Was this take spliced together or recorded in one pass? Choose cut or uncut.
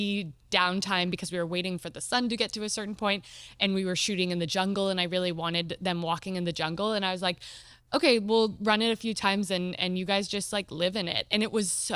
uncut